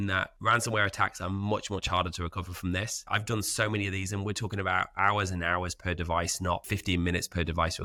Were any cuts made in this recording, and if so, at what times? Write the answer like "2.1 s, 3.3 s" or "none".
none